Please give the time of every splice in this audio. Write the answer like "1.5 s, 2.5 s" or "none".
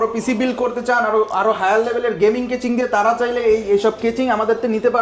none

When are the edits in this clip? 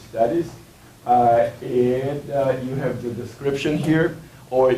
none

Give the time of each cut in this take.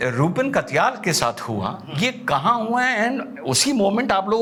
none

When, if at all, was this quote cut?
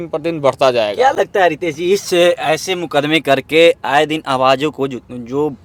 none

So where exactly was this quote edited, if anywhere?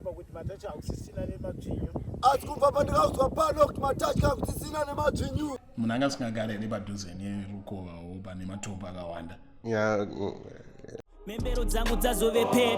5.6 s, 11.1 s

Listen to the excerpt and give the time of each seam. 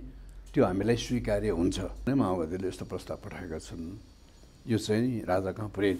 2.1 s

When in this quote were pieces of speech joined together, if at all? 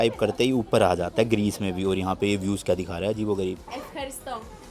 3.6 s

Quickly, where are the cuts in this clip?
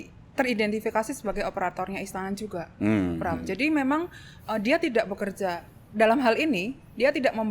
none

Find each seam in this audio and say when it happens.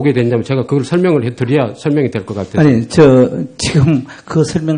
none

